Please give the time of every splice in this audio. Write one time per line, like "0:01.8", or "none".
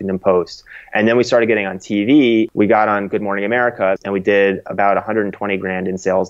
0:02.5
0:04.0